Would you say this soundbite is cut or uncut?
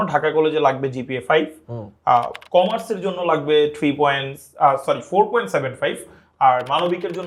uncut